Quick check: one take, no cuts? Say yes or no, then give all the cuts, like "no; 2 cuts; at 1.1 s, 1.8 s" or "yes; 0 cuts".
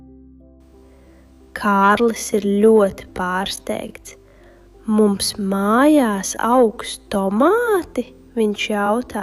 no; 1 cut; at 1.5 s